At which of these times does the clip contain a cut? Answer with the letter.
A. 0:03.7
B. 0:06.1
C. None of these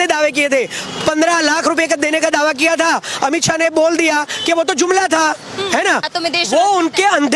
B